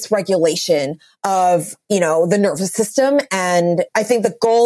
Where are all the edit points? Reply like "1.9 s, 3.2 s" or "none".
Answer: 1.7 s, 3.9 s